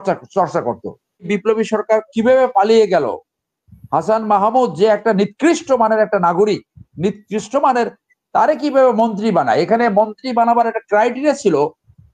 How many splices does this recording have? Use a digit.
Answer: 1